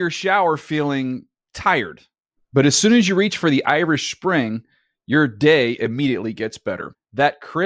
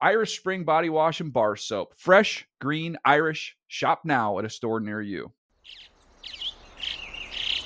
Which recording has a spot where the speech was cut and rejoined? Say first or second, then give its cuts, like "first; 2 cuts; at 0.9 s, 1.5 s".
second; 1 cut; at 5.4 s